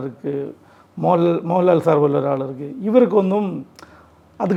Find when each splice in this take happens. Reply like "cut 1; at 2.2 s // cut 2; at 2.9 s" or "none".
none